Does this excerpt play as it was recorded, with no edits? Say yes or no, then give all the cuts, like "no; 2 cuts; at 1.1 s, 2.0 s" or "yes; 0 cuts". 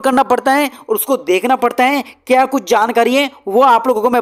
yes; 0 cuts